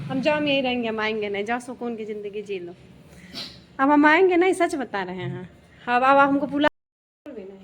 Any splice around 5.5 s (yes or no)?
no